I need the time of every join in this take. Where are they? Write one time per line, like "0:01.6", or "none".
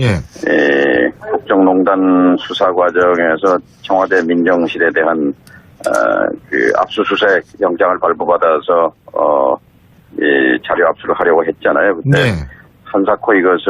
0:12.5